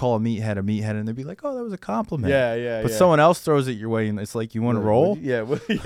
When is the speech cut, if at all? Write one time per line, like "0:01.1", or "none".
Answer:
none